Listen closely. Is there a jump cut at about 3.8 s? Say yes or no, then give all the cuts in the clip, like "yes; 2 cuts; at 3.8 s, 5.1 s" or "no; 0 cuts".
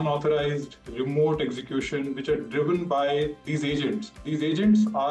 yes; 1 cut; at 3.8 s